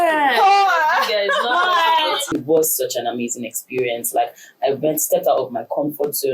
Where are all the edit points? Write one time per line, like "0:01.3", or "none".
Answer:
0:02.3